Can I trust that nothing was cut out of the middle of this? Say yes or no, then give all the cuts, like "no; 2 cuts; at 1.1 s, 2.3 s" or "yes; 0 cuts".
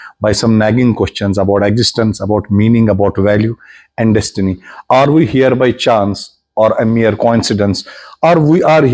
yes; 0 cuts